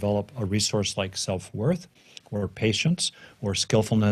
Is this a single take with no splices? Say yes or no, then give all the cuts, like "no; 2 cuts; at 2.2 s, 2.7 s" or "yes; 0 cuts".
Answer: yes; 0 cuts